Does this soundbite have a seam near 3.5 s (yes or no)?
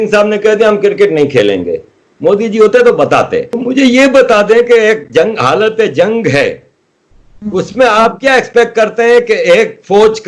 yes